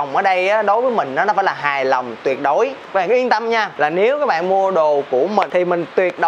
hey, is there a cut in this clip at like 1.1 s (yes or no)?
no